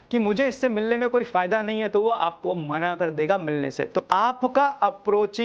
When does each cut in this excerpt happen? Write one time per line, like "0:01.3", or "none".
0:04.0